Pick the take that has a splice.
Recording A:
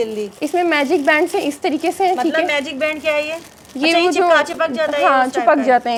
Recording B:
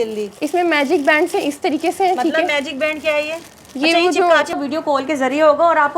B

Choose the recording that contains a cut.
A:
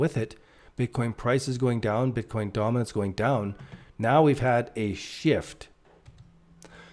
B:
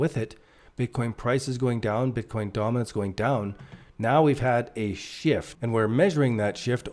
B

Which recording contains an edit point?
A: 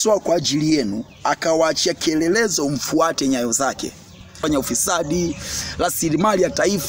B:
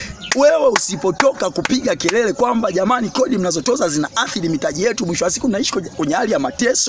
A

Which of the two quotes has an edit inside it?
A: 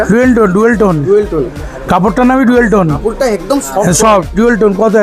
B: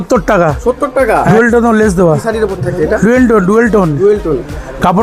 B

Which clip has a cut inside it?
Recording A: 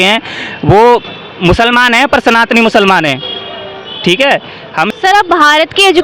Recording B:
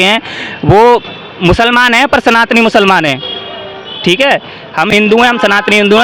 A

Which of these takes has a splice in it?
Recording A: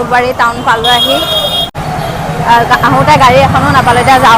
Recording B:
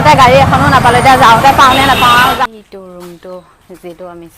B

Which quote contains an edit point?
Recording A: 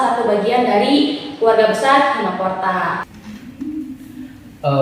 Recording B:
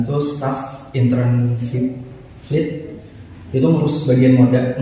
A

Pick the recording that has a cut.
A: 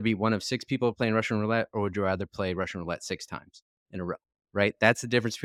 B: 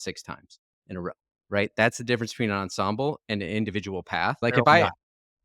B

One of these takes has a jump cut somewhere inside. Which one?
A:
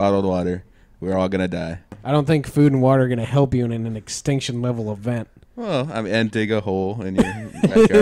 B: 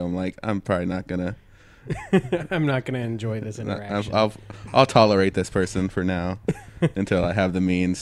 A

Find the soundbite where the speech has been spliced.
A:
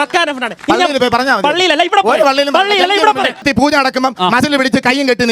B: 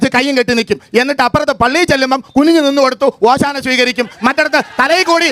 A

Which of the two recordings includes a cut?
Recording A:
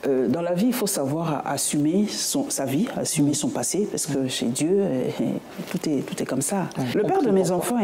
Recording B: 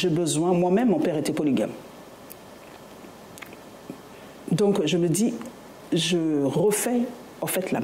A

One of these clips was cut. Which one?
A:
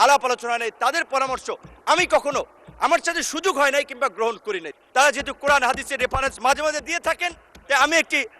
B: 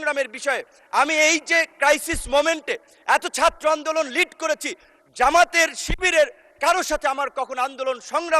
A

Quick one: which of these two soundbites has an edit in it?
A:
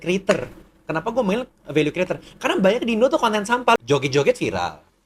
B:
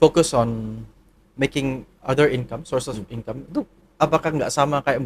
A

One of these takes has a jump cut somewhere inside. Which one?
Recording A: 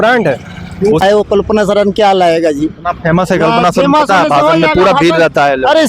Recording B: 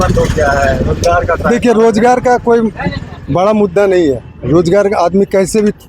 A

